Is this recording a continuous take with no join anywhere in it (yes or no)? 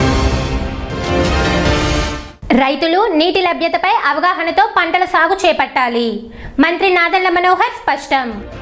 yes